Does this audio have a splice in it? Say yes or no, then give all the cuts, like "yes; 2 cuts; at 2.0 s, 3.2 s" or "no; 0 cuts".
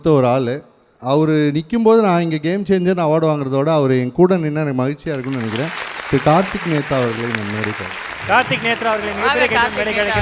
no; 0 cuts